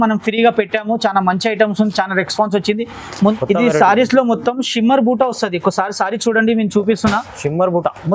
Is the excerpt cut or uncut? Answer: cut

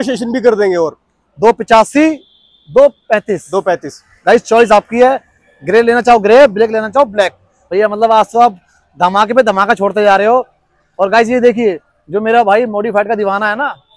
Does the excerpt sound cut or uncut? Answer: cut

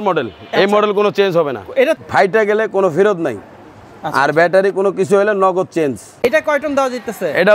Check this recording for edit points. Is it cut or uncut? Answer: cut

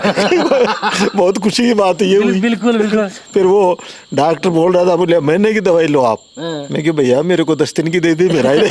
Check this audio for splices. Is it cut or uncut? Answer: uncut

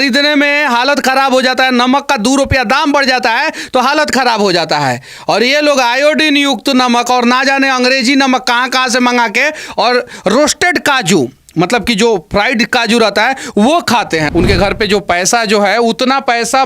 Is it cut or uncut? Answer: cut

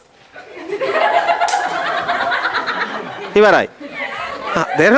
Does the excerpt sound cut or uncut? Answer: uncut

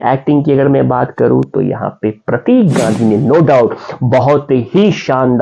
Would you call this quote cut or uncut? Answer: uncut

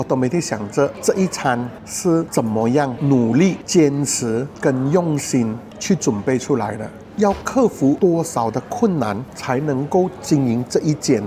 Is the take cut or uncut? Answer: uncut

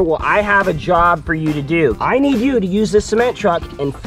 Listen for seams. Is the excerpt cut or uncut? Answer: cut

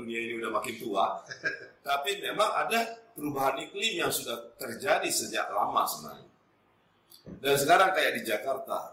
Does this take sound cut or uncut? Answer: uncut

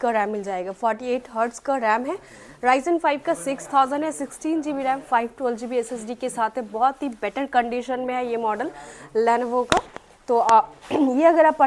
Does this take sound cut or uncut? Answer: uncut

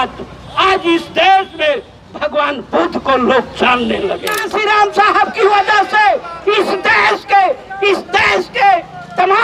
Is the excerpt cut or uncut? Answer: cut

